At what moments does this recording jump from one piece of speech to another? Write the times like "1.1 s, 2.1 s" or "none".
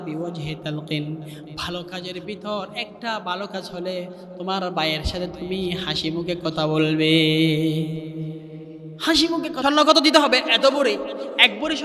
9.6 s